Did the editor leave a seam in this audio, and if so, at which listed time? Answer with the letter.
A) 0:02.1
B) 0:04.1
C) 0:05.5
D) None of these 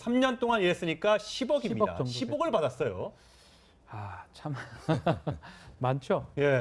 B